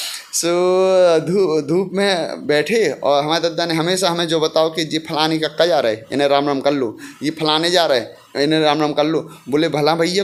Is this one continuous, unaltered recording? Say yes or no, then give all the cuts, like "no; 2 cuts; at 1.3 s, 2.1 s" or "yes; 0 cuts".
yes; 0 cuts